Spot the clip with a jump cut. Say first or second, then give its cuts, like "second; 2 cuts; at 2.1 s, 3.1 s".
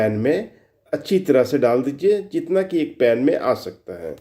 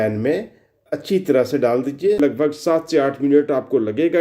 second; 1 cut; at 2.2 s